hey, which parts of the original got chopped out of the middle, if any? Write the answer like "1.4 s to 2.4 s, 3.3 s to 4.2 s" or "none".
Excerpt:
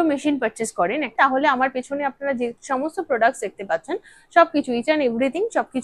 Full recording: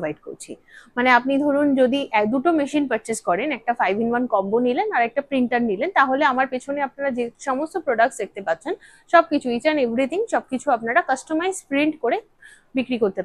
3.6 s to 5.9 s